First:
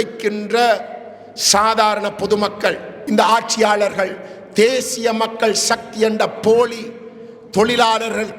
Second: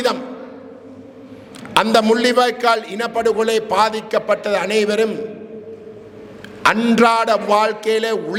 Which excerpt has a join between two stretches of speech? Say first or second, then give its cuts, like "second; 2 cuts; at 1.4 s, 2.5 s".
first; 1 cut; at 2.9 s